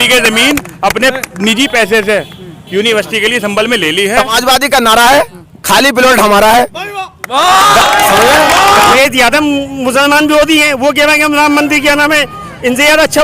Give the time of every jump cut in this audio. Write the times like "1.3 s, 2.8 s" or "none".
4.2 s, 9.0 s